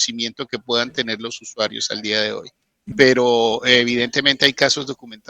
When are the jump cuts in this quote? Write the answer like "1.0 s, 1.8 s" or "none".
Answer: 2.9 s